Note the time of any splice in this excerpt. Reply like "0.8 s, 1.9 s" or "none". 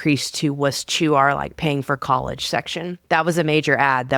2.9 s